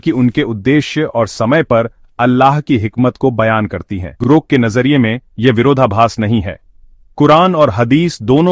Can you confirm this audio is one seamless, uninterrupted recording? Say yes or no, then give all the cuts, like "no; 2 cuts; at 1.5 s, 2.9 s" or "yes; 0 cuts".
no; 1 cut; at 4.1 s